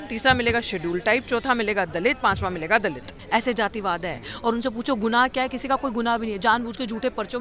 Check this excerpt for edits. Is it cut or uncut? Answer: cut